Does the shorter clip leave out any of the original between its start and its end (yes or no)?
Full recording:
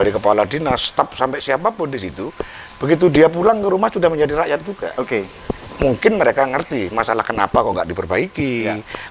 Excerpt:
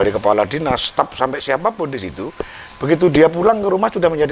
no